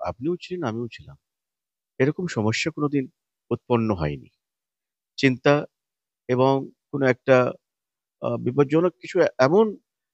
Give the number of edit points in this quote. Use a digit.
0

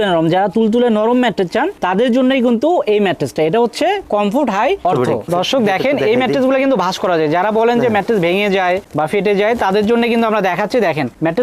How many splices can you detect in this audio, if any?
1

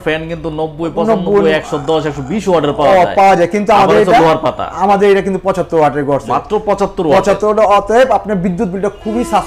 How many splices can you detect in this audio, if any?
0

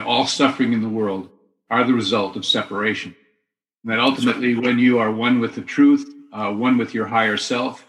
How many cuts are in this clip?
0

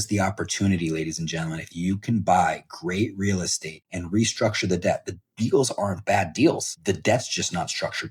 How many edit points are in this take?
0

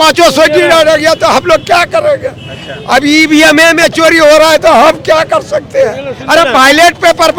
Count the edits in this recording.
0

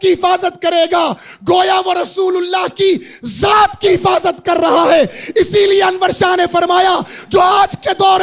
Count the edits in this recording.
0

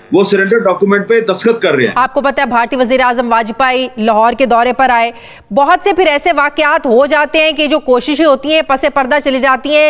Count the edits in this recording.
1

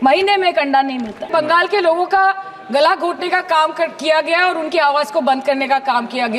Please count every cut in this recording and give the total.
1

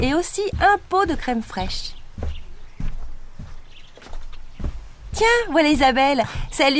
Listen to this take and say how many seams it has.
0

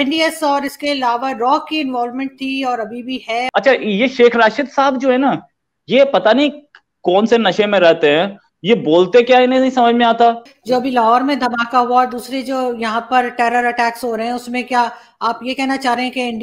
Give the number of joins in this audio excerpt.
2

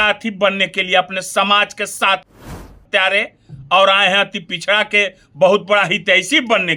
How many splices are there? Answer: 0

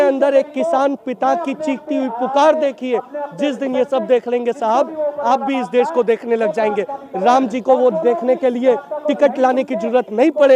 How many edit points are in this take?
0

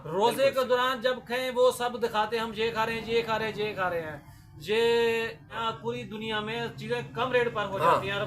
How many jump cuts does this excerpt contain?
1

